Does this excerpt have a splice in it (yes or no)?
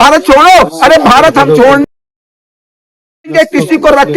no